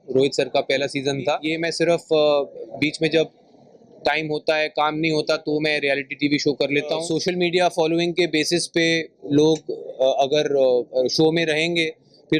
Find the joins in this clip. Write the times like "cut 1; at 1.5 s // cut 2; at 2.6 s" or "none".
cut 1; at 1.5 s // cut 2; at 7.1 s